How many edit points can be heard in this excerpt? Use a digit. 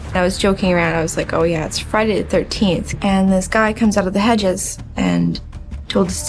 1